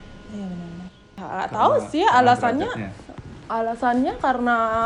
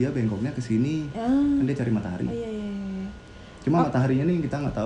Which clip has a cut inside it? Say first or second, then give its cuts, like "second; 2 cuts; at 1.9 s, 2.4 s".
first; 1 cut; at 1.0 s